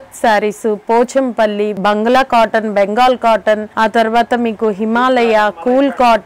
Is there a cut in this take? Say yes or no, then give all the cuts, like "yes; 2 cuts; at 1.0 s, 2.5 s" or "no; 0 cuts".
yes; 2 cuts; at 1.8 s, 3.7 s